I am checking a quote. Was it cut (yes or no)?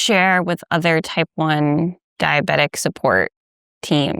yes